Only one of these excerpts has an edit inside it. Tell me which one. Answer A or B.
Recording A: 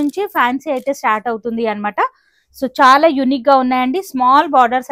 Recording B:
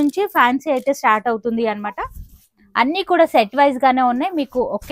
B